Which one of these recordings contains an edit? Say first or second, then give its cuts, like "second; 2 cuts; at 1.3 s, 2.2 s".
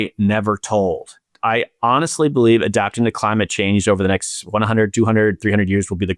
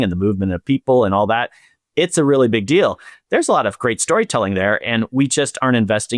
first; 1 cut; at 1.3 s